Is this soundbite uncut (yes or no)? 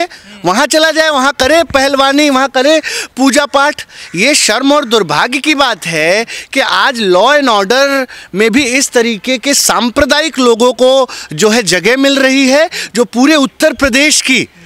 yes